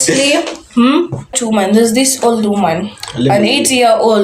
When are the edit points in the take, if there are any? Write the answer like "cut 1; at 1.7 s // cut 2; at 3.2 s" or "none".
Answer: cut 1; at 1.4 s